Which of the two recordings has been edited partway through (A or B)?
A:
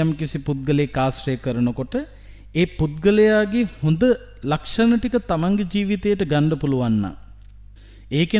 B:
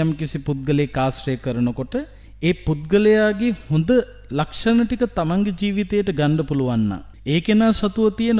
B